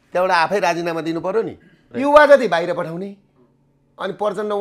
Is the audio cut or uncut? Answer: cut